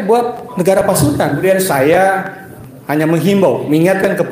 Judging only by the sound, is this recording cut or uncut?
cut